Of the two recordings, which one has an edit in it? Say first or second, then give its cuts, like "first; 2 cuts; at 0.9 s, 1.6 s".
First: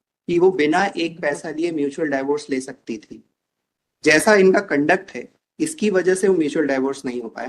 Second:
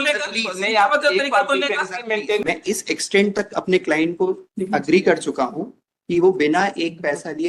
second; 1 cut; at 2.4 s